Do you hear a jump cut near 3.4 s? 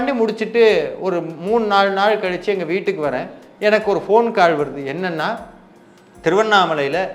no; 0 cuts

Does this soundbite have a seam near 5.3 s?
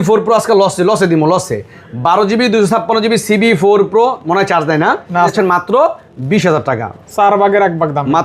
yes; 1 cut; at 5.3 s

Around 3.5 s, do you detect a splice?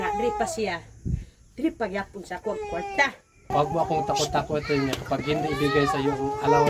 yes; 1 cut; at 3.5 s

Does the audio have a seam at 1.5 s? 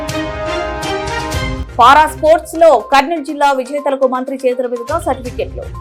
yes; 1 cut; at 1.5 s

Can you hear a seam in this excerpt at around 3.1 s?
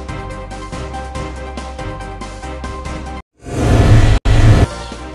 yes; 2 cuts; at 1.5 s, 3.1 s

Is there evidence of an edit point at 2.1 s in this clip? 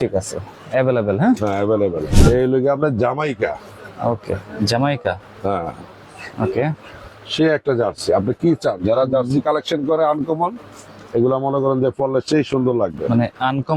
yes; 1 cut; at 2.1 s

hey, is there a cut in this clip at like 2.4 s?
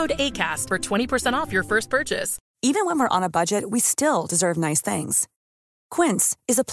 yes; 1 cut; at 2.4 s

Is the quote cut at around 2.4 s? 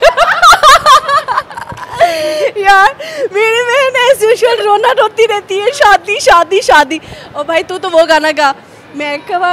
no; 0 cuts

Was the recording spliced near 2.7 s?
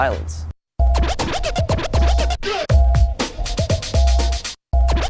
yes; 1 cut; at 2.7 s

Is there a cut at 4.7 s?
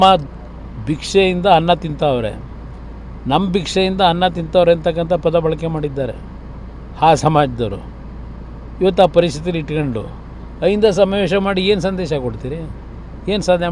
yes; 1 cut; at 4.7 s

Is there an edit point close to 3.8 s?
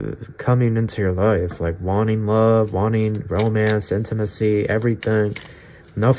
no; 0 cuts

